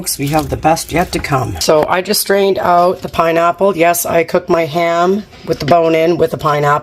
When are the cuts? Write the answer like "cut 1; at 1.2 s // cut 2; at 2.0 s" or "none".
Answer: cut 1; at 1.5 s